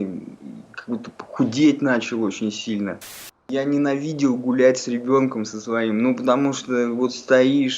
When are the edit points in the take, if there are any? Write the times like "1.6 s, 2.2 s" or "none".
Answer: 3.5 s